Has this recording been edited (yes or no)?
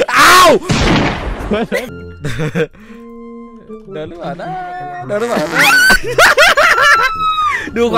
yes